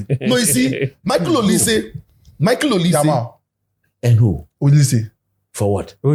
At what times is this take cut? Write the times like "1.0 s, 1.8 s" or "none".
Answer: none